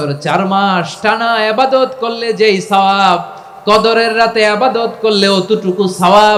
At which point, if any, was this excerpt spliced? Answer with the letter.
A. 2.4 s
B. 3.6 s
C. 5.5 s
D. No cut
D